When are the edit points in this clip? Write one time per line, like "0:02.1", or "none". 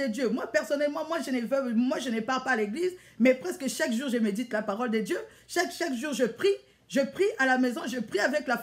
none